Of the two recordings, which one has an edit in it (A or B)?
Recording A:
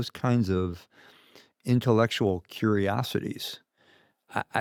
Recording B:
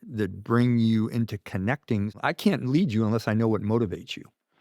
B